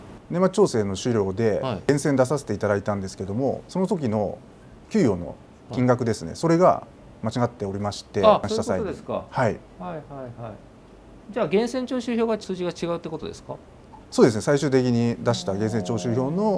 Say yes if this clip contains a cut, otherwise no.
yes